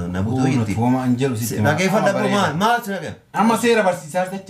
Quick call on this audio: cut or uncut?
cut